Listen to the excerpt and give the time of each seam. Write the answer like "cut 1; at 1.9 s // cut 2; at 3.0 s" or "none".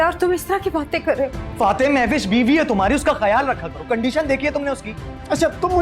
cut 1; at 1.4 s